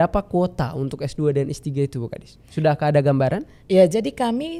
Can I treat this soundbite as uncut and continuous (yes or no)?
yes